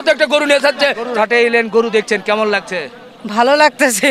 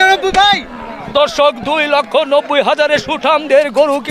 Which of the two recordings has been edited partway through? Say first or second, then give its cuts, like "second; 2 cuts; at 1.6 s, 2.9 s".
first; 1 cut; at 1.0 s